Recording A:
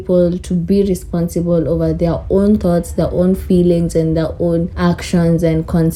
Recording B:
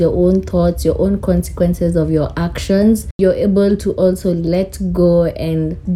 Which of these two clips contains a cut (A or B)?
B